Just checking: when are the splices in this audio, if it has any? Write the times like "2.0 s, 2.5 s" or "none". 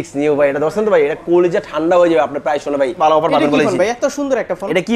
2.9 s

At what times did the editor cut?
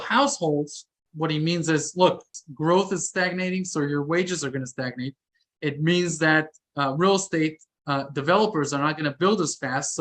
1.0 s, 2.4 s

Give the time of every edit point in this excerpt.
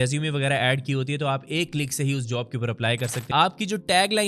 3.3 s

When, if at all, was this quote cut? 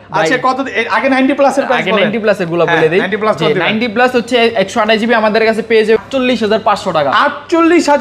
6.0 s

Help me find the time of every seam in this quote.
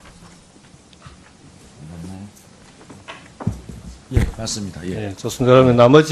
none

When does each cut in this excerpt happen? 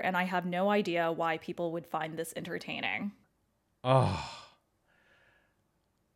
none

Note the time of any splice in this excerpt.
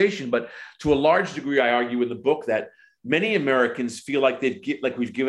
none

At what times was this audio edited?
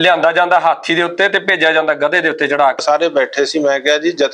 2.8 s

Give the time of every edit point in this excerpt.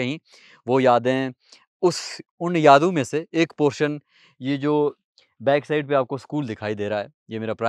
none

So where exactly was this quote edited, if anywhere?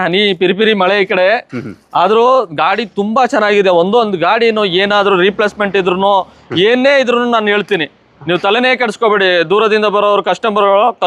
none

